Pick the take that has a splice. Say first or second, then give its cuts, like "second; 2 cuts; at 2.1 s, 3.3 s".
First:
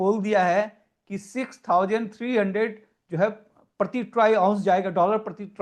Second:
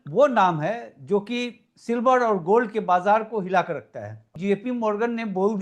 second; 1 cut; at 4.2 s